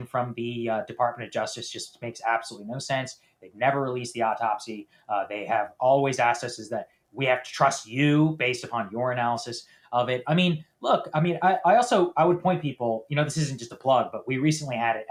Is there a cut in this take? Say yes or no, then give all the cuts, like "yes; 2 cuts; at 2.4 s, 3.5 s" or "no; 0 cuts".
no; 0 cuts